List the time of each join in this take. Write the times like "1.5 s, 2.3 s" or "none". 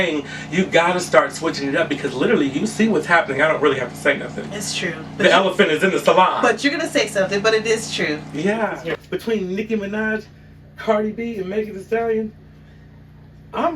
8.8 s

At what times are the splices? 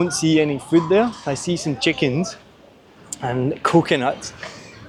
none

